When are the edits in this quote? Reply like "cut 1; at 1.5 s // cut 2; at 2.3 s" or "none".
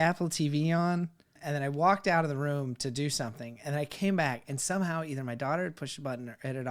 cut 1; at 1.4 s